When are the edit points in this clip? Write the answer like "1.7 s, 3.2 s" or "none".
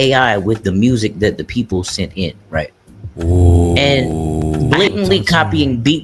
4.7 s